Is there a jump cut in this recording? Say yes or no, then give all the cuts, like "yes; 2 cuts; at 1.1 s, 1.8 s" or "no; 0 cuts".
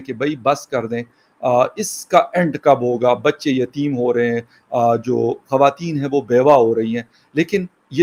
no; 0 cuts